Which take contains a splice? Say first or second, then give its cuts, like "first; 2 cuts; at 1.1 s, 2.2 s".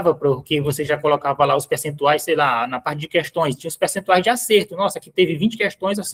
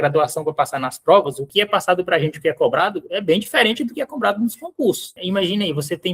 second; 2 cuts; at 1.4 s, 5.1 s